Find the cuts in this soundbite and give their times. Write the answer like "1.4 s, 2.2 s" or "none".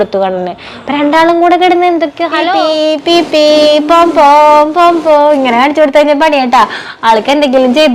2.5 s